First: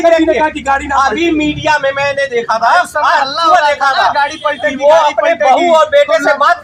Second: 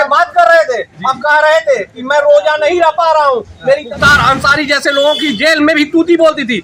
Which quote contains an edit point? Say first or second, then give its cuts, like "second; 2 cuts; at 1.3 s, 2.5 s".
second; 1 cut; at 4.0 s